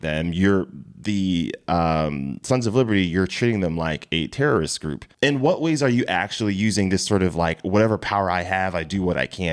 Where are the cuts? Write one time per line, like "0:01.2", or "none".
none

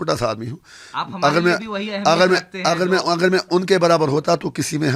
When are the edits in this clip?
none

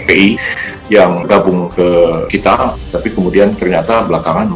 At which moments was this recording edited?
0:01.0
0:02.5

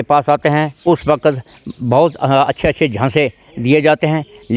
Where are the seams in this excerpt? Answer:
none

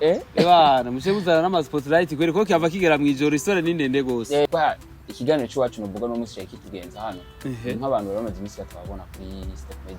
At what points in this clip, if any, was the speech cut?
0:04.5

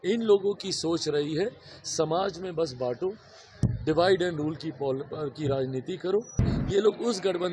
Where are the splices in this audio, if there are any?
0:06.5

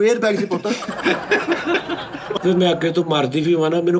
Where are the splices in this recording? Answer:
0:02.4

